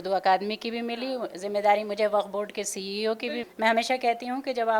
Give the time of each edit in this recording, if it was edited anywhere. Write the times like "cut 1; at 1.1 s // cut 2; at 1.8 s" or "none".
cut 1; at 3.4 s